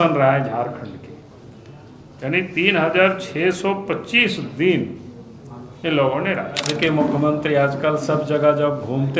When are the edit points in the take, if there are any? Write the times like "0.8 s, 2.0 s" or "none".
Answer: 6.6 s